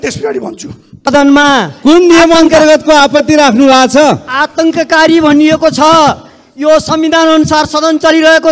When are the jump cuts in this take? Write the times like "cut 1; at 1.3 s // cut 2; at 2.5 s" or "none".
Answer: cut 1; at 1.1 s